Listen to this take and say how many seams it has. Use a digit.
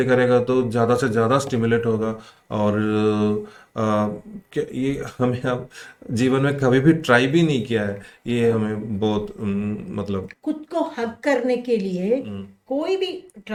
0